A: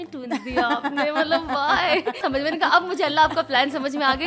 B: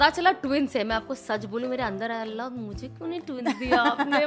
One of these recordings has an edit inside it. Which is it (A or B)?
A